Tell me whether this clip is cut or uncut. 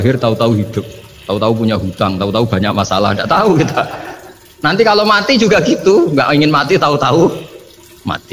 uncut